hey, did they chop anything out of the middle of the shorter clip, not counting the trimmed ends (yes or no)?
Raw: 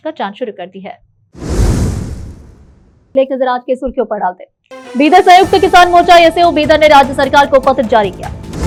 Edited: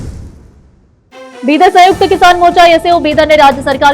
yes